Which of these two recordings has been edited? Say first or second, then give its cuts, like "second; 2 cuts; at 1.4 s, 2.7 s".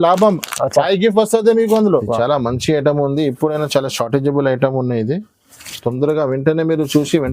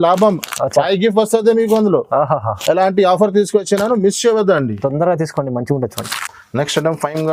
first; 1 cut; at 2.0 s